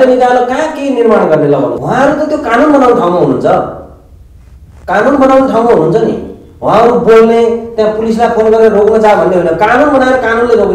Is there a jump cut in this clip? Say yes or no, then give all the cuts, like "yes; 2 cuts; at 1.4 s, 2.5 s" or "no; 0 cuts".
yes; 1 cut; at 1.8 s